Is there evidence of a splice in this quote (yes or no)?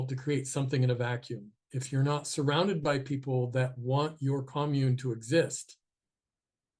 no